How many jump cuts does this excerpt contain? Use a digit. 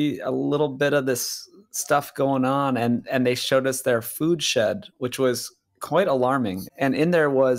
1